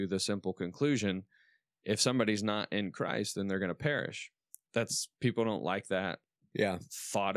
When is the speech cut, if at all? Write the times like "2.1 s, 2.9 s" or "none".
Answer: none